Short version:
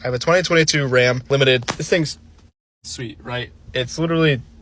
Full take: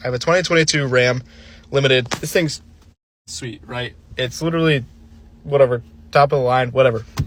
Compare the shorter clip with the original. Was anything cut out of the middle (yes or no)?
yes